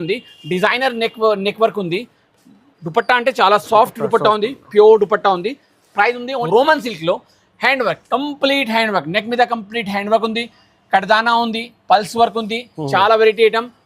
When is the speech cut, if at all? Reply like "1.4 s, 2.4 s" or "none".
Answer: 6.4 s